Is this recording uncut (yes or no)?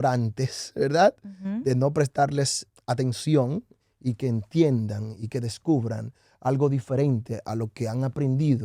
yes